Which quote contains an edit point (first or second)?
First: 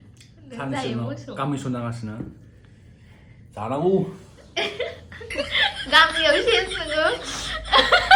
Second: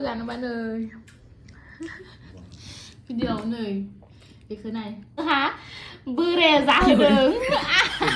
second